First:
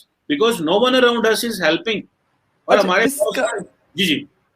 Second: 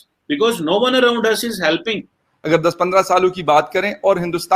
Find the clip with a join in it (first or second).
second